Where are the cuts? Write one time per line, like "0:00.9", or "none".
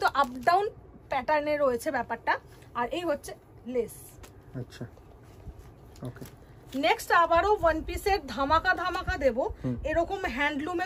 none